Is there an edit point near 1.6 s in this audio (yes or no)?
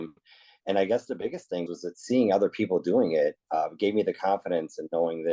yes